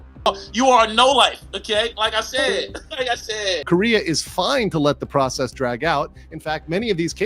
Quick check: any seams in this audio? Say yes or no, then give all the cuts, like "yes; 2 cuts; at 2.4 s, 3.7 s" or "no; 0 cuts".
yes; 1 cut; at 3.6 s